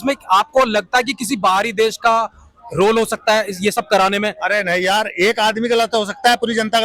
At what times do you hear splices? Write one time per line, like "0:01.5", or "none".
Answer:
none